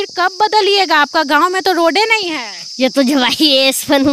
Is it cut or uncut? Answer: uncut